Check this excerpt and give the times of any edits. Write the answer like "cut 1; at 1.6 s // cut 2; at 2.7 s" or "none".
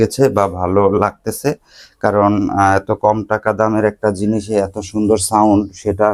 none